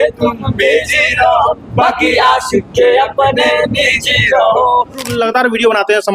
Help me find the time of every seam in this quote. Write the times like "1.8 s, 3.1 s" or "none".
5.1 s